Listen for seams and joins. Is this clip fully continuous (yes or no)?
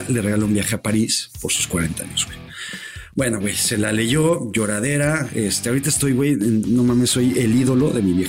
yes